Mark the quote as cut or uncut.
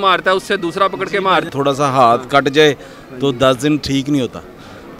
cut